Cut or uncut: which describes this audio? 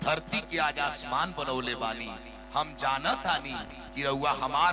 uncut